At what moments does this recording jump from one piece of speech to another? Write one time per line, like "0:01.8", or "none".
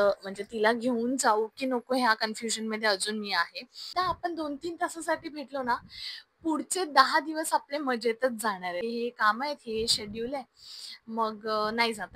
0:03.9
0:08.8